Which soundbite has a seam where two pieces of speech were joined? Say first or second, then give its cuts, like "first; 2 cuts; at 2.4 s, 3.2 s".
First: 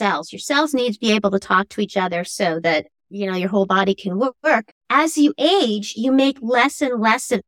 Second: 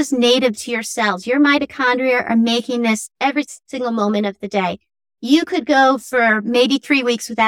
first; 1 cut; at 4.7 s